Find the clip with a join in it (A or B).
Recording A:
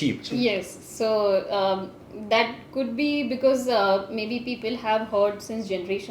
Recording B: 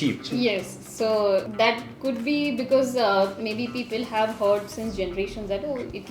B